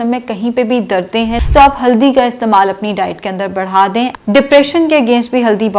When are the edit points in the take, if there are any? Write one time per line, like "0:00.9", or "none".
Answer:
0:01.4
0:04.1